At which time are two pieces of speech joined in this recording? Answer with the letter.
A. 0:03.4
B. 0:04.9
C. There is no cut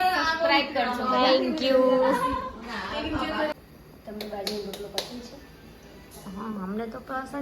A